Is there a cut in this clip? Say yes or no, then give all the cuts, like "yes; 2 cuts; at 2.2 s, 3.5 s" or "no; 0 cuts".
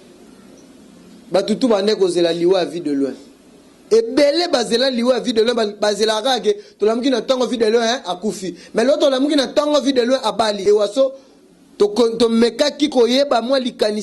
yes; 1 cut; at 10.6 s